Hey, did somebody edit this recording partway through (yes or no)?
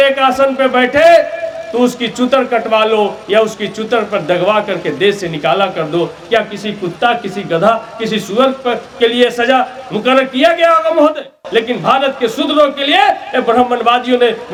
no